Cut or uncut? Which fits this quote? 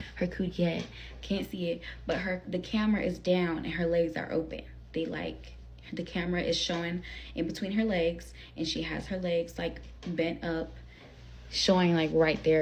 uncut